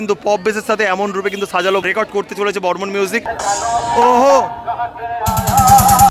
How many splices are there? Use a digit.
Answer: 2